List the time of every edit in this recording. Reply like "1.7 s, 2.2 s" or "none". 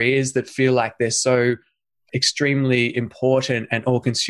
2.1 s